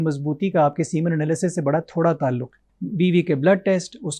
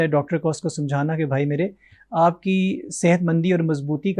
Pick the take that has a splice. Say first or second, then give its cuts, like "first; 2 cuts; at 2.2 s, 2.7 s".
first; 1 cut; at 2.6 s